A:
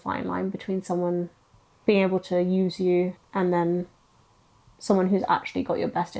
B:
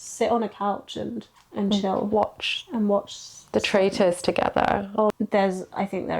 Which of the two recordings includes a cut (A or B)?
B